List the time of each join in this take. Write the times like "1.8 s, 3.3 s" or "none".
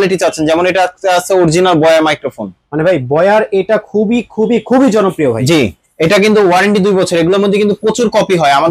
none